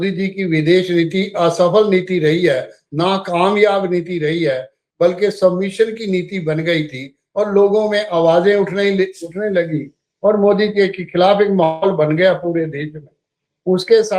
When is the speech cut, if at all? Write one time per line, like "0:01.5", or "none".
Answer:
none